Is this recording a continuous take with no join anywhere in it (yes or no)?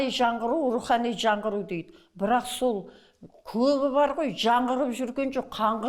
yes